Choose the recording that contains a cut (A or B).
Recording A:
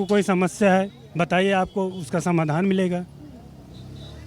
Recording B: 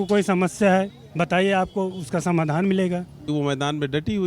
B